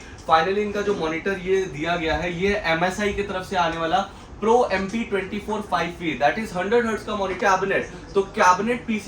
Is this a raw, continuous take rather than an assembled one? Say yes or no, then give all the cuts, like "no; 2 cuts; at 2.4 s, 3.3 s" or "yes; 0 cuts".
no; 1 cut; at 7.4 s